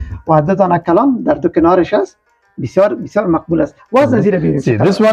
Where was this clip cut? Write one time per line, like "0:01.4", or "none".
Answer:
none